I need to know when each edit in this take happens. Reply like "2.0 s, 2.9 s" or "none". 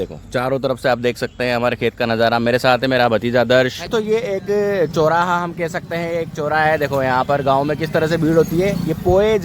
3.8 s